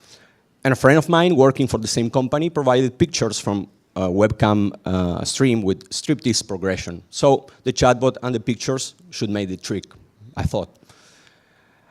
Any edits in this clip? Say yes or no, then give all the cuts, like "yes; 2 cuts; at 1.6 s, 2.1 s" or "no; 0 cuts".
yes; 1 cut; at 7.0 s